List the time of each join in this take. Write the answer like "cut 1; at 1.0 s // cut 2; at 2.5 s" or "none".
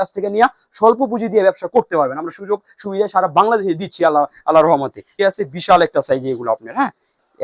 cut 1; at 5.1 s